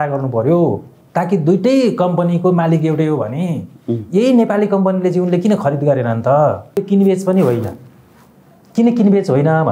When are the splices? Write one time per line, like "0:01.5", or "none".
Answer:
0:06.8

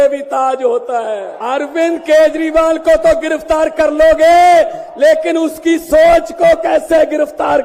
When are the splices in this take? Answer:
0:01.3

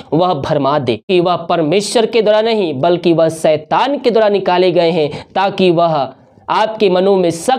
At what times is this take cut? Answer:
0:01.1

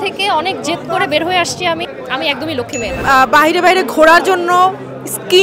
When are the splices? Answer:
0:01.9
0:03.0

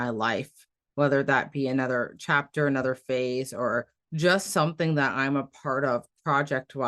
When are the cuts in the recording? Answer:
0:04.0

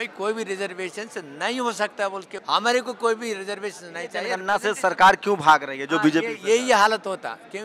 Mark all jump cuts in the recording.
0:02.3
0:04.4

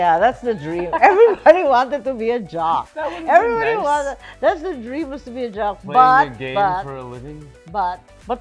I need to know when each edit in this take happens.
none

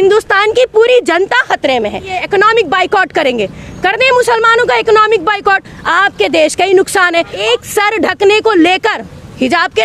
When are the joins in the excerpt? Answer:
0:02.2
0:07.4

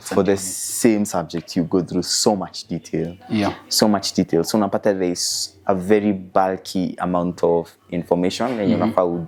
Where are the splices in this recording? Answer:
none

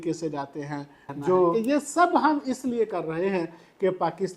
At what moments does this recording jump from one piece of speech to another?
0:01.5

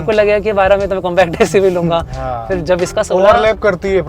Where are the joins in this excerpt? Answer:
none

